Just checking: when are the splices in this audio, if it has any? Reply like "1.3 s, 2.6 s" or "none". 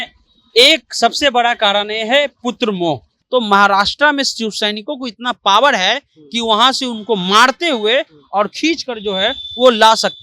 3.1 s

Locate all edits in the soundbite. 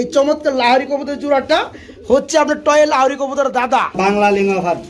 4.0 s

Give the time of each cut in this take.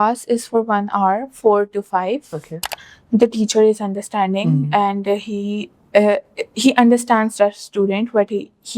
2.7 s

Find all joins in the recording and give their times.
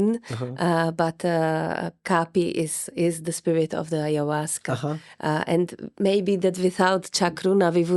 none

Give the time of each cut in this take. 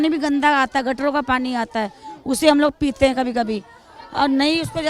none

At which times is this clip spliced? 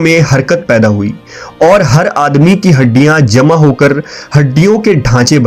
none

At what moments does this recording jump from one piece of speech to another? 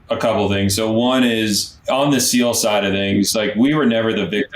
1.7 s

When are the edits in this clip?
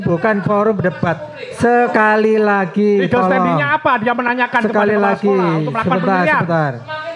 none

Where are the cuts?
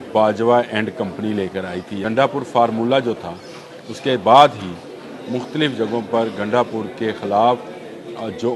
2.0 s

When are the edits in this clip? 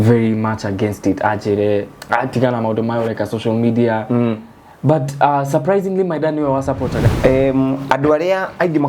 7.0 s

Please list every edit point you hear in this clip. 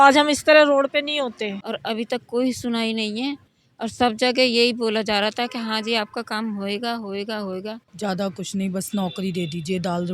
1.6 s, 7.8 s

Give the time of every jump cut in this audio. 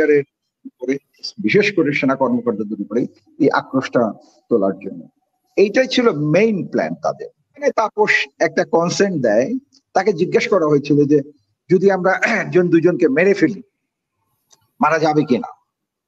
7.5 s

